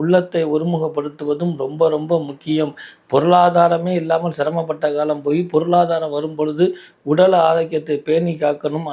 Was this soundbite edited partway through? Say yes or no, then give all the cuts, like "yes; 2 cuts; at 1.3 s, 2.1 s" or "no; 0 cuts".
no; 0 cuts